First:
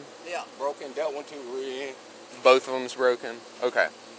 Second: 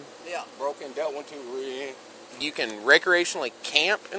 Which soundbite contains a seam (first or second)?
second